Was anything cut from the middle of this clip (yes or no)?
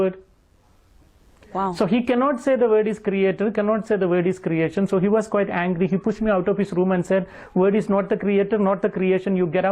no